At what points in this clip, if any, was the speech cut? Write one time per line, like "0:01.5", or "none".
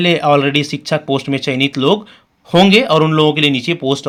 none